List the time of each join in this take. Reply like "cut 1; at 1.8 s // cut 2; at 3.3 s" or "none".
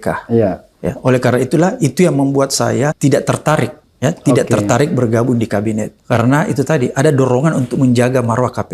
cut 1; at 3.0 s // cut 2; at 3.8 s // cut 3; at 5.9 s